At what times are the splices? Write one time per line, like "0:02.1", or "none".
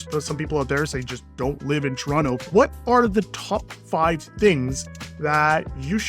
0:02.4